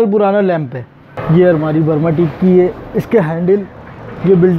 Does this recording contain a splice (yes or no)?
yes